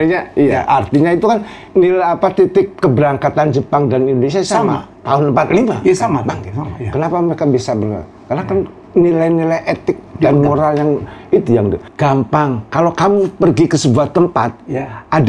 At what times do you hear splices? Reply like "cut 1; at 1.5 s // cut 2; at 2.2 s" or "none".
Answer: cut 1; at 1.6 s // cut 2; at 4.9 s // cut 3; at 8.8 s // cut 4; at 10.1 s // cut 5; at 11.9 s